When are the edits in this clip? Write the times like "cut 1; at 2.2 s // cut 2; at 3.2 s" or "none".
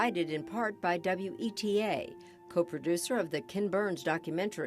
none